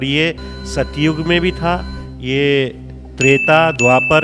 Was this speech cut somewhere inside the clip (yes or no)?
no